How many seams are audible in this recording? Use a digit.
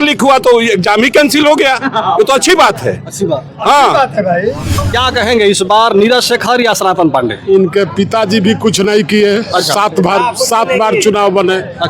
1